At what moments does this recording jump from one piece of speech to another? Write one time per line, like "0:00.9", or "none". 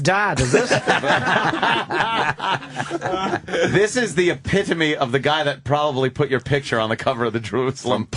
0:04.8